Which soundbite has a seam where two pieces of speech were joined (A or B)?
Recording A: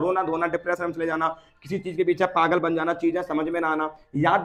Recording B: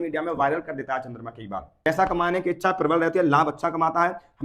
B